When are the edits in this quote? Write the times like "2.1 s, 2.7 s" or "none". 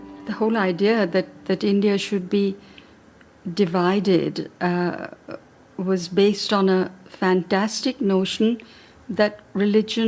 6.9 s